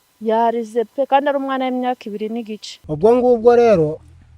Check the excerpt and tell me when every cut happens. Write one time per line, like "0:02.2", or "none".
0:02.9